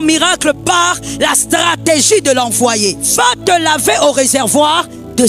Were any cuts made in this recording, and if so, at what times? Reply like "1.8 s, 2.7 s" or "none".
3.0 s